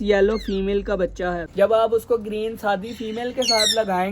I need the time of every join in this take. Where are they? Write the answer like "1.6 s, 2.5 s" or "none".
1.5 s